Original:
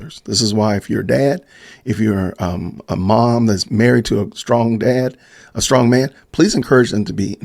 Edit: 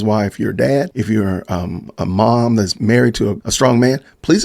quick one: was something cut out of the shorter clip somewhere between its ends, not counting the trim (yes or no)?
yes